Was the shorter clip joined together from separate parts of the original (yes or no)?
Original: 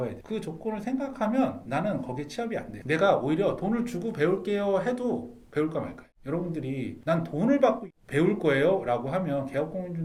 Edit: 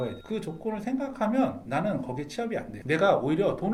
no